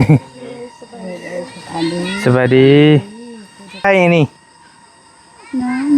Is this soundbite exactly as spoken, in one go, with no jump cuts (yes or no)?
no